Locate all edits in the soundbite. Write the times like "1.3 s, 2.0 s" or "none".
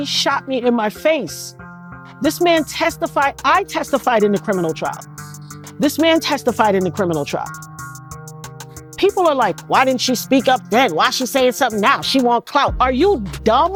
none